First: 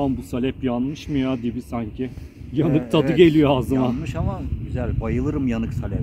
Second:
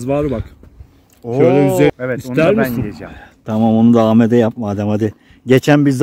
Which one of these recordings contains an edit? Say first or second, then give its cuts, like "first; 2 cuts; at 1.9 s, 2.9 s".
second; 1 cut; at 1.9 s